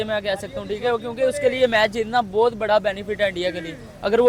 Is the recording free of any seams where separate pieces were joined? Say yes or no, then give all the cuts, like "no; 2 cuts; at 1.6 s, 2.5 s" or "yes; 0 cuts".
yes; 0 cuts